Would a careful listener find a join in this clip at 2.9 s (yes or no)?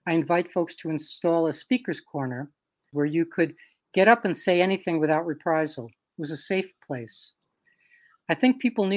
yes